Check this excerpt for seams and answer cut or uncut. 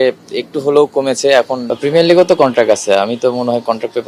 cut